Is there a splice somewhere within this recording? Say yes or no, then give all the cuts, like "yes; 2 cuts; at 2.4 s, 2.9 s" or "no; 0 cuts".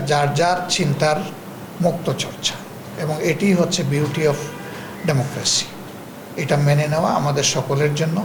no; 0 cuts